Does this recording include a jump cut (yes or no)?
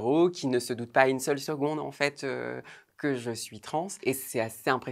no